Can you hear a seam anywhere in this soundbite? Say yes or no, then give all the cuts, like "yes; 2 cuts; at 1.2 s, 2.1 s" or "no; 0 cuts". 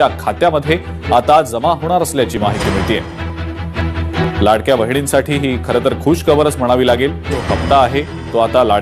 no; 0 cuts